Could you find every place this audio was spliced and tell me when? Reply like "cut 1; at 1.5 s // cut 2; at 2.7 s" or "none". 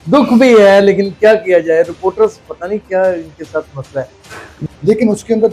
cut 1; at 4.6 s